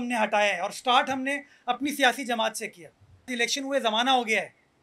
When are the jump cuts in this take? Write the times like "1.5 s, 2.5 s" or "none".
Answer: 3.3 s